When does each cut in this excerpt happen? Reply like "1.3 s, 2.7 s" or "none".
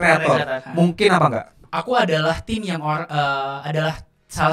1.6 s